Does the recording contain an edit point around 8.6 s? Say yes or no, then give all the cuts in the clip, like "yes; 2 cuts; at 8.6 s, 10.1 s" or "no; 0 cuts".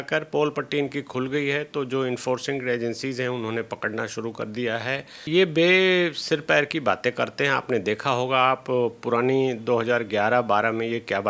no; 1 cut; at 5.2 s